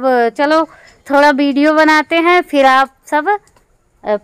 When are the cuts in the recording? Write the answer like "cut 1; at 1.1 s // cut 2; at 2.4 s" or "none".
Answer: none